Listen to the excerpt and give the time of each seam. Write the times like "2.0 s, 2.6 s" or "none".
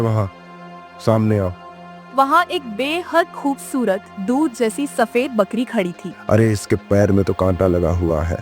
2.0 s, 6.1 s